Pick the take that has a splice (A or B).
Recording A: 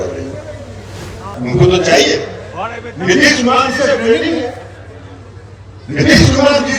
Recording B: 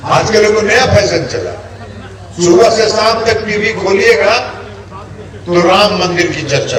A